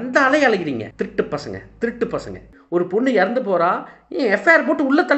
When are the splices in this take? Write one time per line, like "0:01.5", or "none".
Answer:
0:00.9
0:02.5